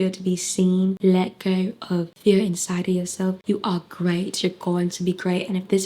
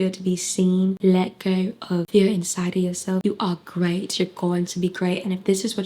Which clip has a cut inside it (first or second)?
second